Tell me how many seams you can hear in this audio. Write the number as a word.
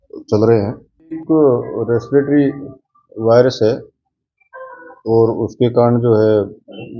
one